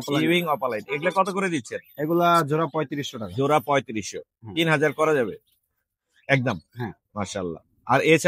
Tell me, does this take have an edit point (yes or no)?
no